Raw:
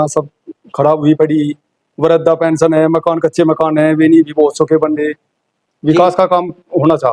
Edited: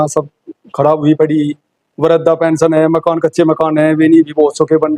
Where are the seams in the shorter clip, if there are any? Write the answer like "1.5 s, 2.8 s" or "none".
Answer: none